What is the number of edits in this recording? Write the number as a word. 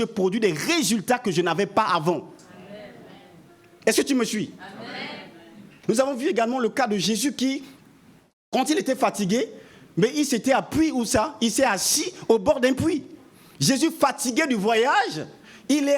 one